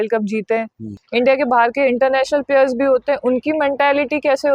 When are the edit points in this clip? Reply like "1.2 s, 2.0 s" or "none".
1.0 s